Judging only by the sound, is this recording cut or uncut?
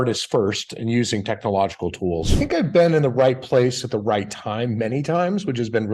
cut